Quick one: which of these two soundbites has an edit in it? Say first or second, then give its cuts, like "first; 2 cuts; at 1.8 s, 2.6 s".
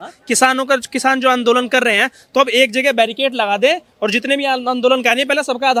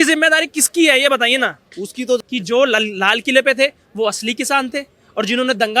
second; 1 cut; at 2.2 s